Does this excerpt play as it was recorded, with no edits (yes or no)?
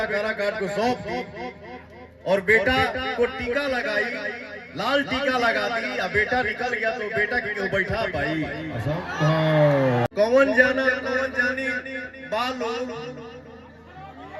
no